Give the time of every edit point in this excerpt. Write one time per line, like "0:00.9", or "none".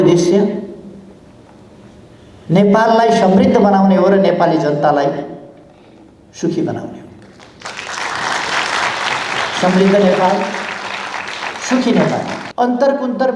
0:12.4